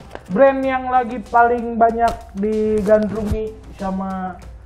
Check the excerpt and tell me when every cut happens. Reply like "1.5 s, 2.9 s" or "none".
none